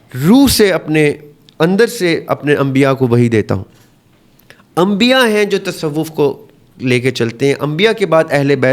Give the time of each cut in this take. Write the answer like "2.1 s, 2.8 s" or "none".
none